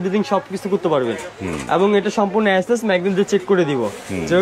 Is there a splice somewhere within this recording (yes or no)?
no